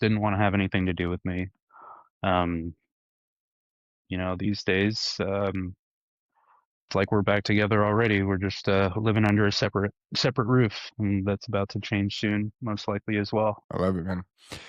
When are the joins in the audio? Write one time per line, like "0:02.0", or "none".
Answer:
none